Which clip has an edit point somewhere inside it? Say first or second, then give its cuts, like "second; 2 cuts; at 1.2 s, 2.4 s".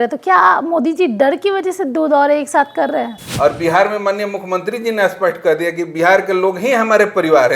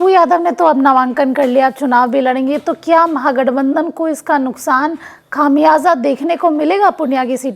first; 1 cut; at 3.2 s